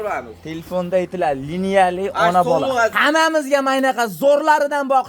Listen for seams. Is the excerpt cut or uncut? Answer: cut